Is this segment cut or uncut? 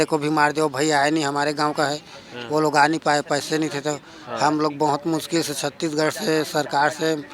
uncut